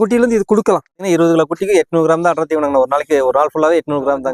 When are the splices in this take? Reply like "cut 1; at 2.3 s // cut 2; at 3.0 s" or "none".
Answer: cut 1; at 1.0 s